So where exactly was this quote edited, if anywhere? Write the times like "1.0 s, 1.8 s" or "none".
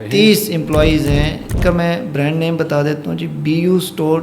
1.6 s